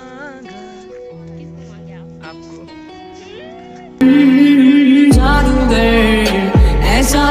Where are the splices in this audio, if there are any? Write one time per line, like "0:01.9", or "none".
none